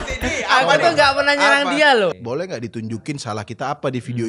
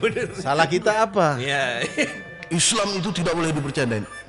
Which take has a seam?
first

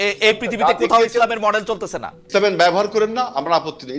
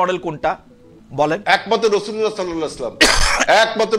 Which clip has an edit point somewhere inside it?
first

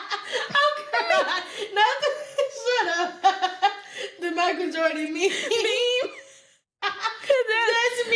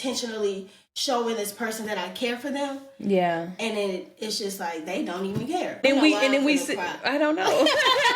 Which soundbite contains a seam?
second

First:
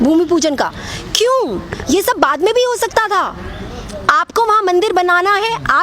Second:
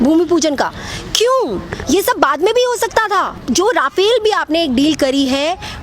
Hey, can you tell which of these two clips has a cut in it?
second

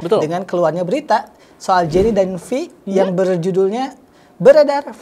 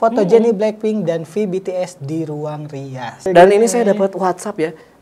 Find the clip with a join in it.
second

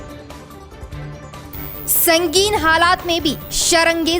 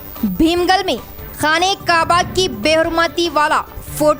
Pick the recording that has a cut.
first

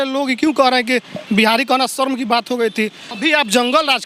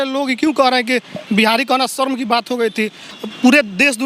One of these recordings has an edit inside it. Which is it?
first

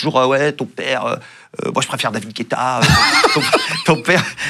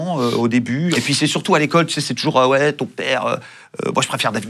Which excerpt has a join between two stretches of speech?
second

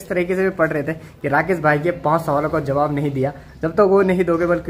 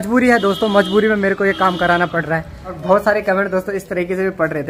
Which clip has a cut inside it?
second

